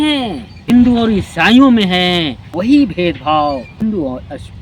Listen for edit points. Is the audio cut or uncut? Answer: cut